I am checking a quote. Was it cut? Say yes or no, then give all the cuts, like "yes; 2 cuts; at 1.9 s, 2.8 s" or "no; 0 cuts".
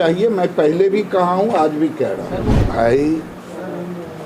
yes; 1 cut; at 2.7 s